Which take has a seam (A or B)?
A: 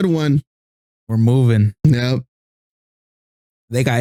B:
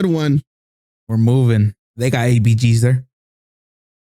B